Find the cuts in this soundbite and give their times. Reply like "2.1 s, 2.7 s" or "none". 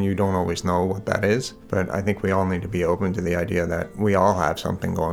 1.6 s, 3.9 s